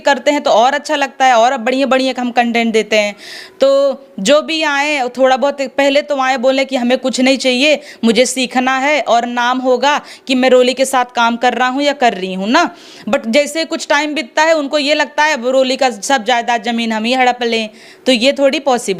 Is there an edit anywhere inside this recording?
no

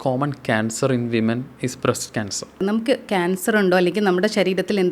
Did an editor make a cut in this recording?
yes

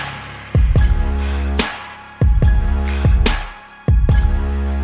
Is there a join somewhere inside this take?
no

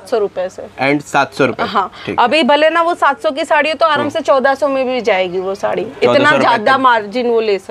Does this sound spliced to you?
no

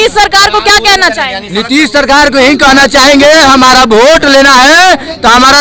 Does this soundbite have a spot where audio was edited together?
no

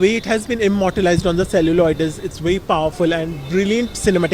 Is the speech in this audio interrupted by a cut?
no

